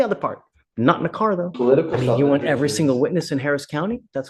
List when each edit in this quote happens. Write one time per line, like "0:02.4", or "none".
0:01.5